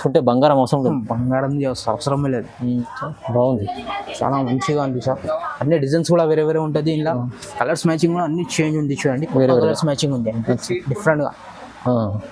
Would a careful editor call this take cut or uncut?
cut